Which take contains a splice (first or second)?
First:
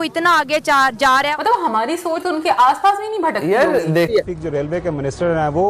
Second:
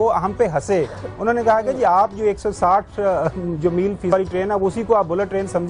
first